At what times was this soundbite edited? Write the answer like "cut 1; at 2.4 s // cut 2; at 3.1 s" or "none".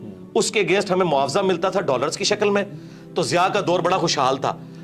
none